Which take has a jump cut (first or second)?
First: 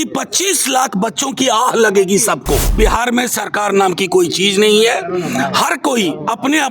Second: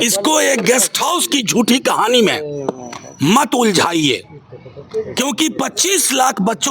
first